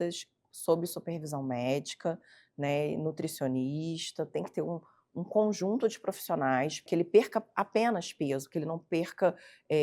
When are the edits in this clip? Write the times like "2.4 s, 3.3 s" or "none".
6.8 s